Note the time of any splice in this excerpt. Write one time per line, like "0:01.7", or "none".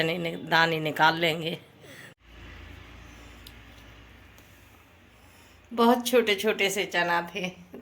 0:02.1